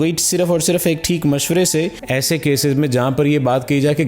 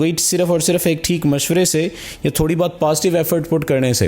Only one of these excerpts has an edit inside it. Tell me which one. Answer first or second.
first